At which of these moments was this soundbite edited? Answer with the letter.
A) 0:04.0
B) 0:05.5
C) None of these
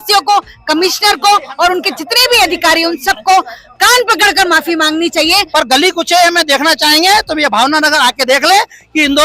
B